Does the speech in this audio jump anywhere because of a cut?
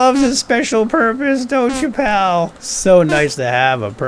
yes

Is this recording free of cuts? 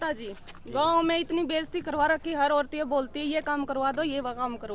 yes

